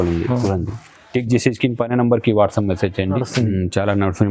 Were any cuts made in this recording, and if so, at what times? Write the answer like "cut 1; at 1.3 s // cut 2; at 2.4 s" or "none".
cut 1; at 3.2 s